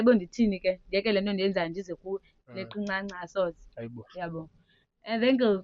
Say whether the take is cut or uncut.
uncut